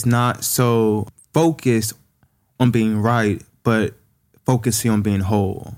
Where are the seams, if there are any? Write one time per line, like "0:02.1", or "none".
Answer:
0:01.1

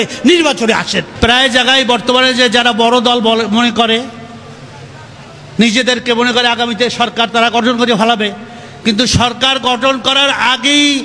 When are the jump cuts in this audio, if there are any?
0:01.1

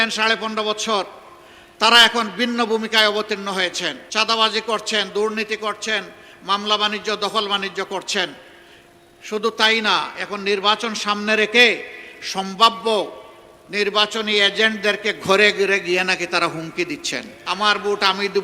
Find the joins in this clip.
0:04.0
0:17.3

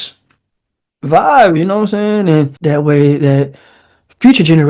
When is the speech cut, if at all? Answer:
0:02.5

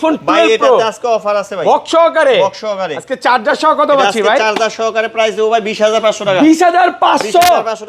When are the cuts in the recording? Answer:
none

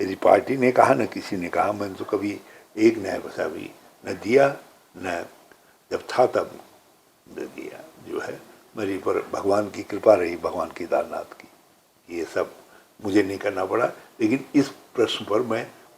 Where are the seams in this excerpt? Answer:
none

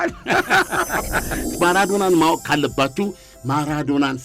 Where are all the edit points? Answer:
0:01.5

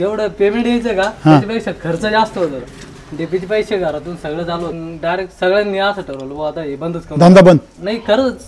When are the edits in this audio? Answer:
0:04.7

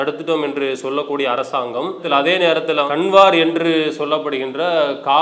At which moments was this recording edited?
0:02.9

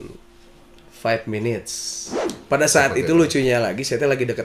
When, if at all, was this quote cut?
0:02.3

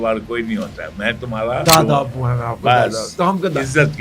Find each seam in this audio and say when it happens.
0:01.6

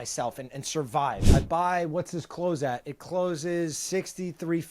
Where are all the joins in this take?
0:01.2

